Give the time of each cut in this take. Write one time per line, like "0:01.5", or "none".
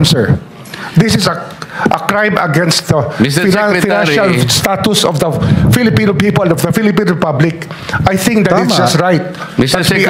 none